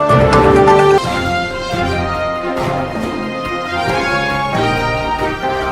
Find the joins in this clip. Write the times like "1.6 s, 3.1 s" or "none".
0.9 s